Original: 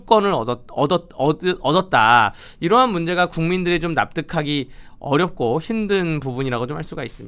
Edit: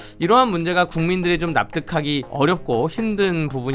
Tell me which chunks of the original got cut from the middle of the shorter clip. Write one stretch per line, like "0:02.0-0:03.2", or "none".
0:04.7-0:05.0